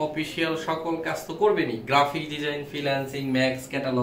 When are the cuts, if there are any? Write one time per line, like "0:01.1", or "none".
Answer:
none